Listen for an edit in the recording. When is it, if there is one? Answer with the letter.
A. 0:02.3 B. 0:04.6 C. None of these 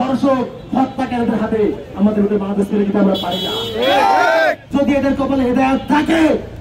B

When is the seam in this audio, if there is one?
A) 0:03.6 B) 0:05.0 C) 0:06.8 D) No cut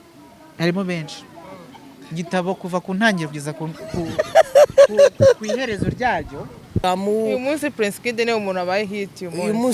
C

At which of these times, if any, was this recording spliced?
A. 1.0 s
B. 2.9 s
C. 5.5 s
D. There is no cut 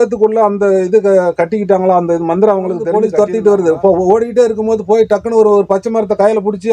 B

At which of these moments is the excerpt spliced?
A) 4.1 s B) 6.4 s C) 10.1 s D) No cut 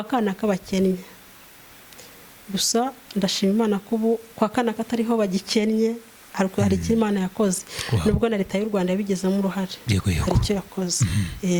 D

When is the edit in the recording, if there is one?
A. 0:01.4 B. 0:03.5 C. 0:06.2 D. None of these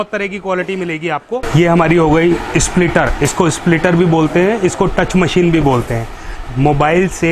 A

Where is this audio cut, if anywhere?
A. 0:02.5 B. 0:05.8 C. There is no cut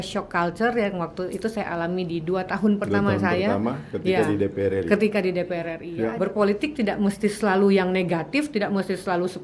B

